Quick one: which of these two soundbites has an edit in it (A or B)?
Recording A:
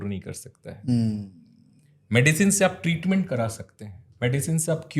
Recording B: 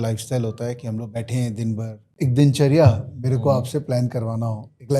B